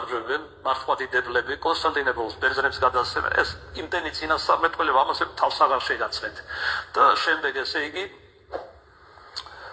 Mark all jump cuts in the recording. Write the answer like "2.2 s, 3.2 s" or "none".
5.6 s